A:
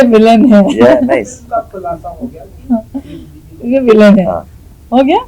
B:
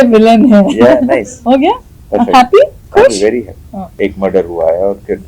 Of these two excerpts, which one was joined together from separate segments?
B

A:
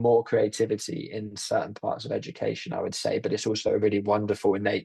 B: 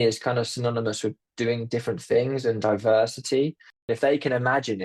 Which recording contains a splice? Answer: B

